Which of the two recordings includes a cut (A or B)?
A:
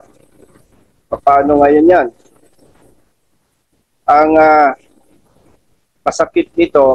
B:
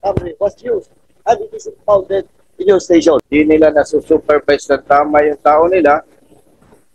B